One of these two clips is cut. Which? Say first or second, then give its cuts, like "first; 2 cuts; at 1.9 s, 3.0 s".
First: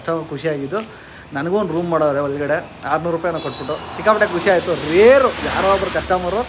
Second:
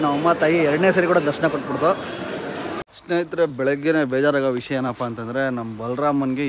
second; 1 cut; at 2.8 s